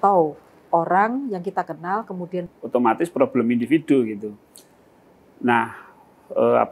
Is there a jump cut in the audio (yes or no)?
yes